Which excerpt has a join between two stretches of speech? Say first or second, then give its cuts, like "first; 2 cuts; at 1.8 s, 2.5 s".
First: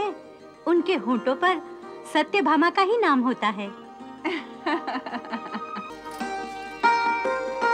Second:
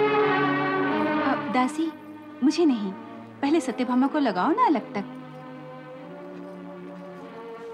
first; 1 cut; at 5.9 s